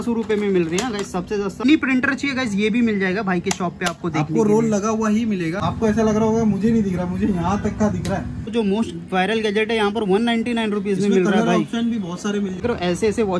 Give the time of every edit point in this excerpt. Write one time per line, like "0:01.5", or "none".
0:01.6
0:05.6
0:08.4
0:12.6